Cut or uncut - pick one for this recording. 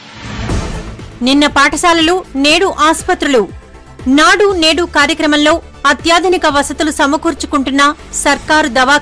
cut